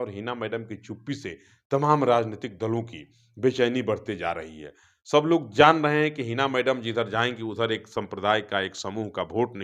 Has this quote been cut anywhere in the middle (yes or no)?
no